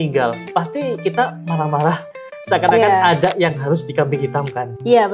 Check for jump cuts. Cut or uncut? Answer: uncut